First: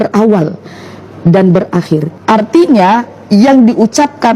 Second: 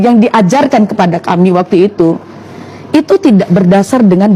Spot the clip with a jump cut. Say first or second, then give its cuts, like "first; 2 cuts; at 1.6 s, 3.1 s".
first; 1 cut; at 2.1 s